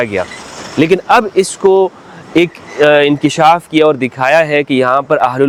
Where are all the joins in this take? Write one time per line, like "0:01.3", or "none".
none